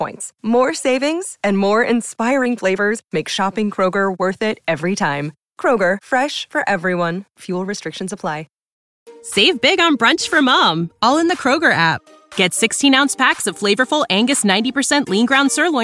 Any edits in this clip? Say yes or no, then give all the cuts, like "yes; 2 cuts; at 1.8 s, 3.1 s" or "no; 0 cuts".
yes; 1 cut; at 8.8 s